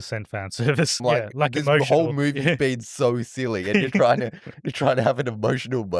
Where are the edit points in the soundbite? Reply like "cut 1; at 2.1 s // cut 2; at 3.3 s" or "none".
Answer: cut 1; at 1.0 s